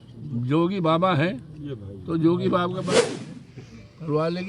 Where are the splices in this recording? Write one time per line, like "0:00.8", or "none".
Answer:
0:03.1